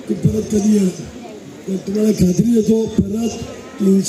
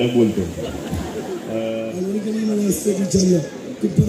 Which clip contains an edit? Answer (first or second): second